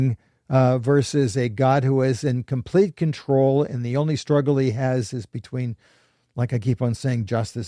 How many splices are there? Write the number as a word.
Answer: zero